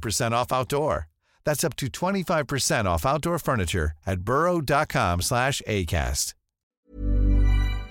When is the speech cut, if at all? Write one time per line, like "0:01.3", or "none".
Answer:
0:06.9